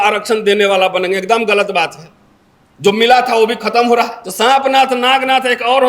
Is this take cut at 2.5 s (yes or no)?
no